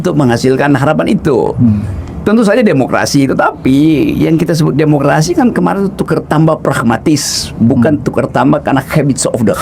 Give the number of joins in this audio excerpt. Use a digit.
0